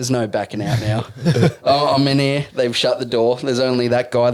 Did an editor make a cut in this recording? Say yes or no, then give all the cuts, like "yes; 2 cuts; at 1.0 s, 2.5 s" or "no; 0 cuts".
no; 0 cuts